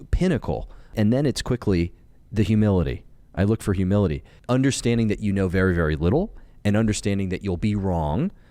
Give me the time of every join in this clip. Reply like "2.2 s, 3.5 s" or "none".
0.9 s, 4.3 s